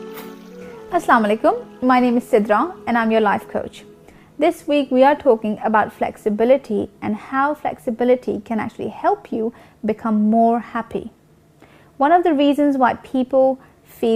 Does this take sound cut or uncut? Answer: uncut